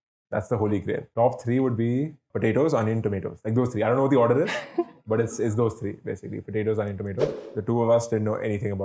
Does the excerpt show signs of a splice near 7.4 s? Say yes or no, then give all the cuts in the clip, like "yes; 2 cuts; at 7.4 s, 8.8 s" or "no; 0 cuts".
yes; 3 cuts; at 1.1 s, 2.3 s, 7.4 s